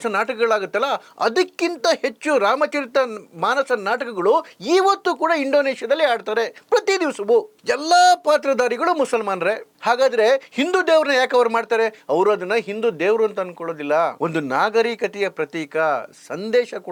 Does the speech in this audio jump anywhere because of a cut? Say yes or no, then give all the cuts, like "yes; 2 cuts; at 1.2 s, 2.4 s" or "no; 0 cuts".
no; 0 cuts